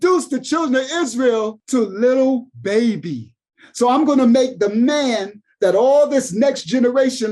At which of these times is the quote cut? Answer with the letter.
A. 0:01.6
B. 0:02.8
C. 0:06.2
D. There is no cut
A